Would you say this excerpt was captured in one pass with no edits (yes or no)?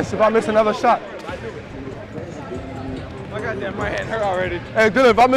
yes